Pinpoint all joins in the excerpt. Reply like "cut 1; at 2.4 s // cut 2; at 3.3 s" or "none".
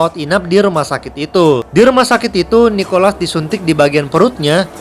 cut 1; at 1.7 s